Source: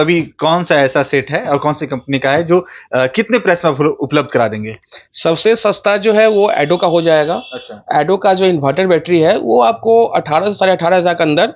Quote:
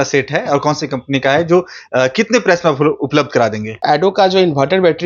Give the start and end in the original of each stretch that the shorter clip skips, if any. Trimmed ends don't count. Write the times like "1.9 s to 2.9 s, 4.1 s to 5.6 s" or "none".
4.7 s to 7.7 s